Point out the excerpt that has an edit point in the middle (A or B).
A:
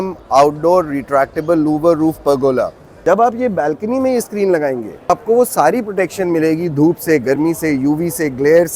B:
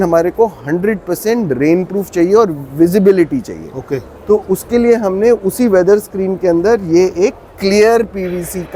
A